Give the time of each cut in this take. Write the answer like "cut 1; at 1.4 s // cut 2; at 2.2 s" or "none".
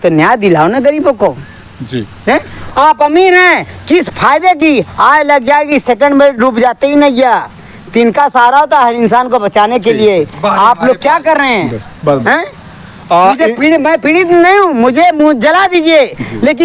none

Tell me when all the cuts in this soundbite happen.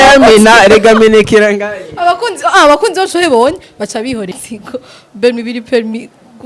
cut 1; at 4.3 s

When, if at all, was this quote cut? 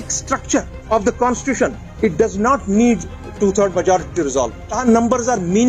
cut 1; at 0.9 s // cut 2; at 1.8 s // cut 3; at 4.7 s

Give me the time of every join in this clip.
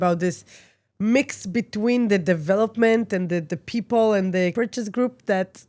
cut 1; at 4.5 s

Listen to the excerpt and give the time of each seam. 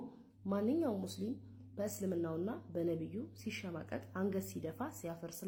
none

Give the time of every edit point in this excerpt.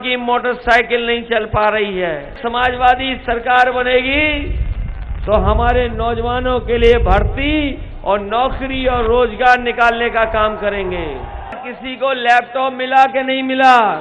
cut 1; at 2.4 s // cut 2; at 11.7 s

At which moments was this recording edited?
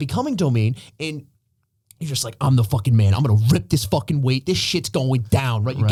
none

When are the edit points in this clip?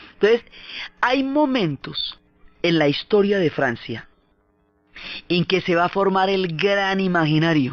cut 1; at 2.9 s

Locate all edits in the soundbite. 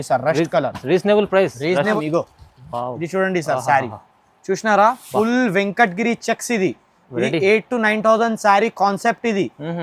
cut 1; at 2.0 s

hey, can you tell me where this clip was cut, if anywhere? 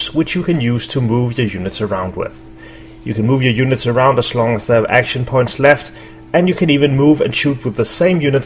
cut 1; at 2.4 s

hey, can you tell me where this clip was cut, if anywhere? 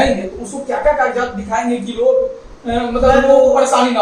none

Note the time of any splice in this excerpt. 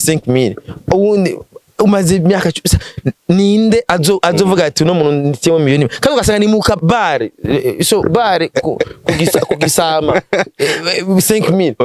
none

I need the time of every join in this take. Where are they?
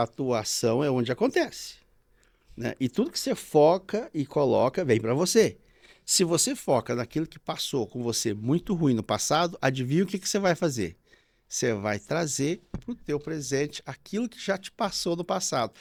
none

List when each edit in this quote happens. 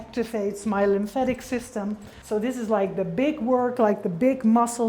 cut 1; at 2.1 s

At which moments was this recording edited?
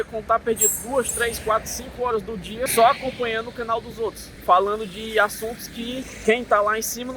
cut 1; at 2.7 s // cut 2; at 4.3 s // cut 3; at 6.1 s

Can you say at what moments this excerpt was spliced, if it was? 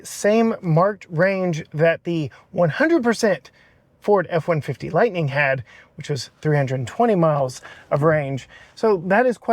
none

